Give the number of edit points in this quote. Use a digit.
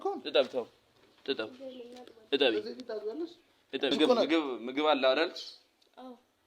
1